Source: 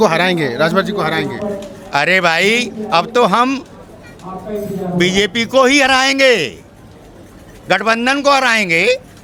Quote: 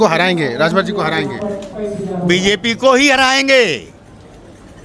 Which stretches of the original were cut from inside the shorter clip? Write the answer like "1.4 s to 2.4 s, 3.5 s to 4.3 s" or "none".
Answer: 1.7 s to 4.4 s